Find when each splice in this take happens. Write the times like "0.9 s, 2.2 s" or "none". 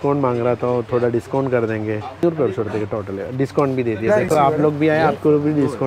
2.2 s